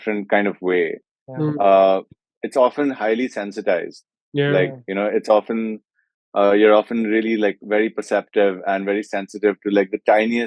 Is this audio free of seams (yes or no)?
yes